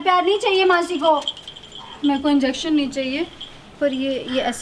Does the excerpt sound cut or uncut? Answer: uncut